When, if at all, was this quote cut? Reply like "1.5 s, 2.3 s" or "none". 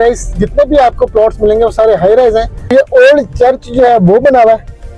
2.6 s